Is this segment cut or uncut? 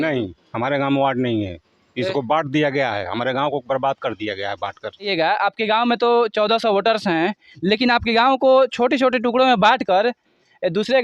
cut